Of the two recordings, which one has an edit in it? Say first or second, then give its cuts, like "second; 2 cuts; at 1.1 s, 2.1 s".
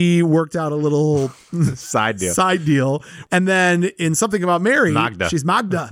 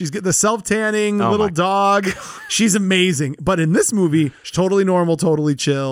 first; 1 cut; at 3.1 s